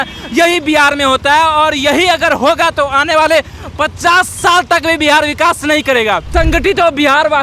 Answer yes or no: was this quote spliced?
yes